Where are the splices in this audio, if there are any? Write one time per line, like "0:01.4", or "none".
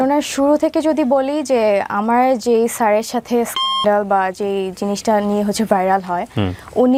none